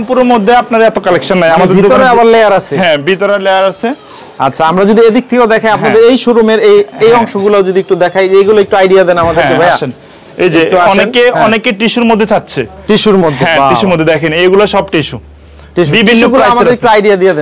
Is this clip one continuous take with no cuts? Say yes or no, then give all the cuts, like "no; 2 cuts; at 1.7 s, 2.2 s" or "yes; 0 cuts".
yes; 0 cuts